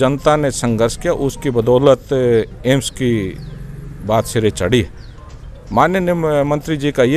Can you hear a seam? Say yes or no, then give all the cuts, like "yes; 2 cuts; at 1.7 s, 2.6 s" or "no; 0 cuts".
no; 0 cuts